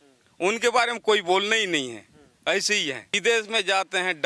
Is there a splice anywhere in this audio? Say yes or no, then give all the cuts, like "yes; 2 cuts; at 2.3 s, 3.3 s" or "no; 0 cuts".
yes; 1 cut; at 3.1 s